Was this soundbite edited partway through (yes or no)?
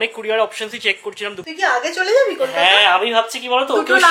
yes